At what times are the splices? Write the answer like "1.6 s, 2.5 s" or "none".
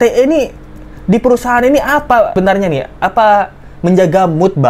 2.4 s